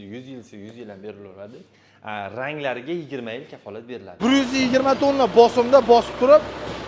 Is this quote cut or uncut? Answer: cut